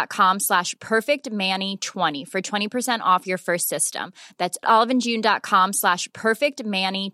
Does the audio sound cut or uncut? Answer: cut